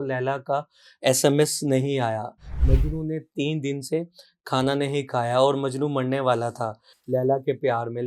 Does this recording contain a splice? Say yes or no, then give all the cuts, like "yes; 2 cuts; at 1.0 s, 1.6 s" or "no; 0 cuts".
no; 0 cuts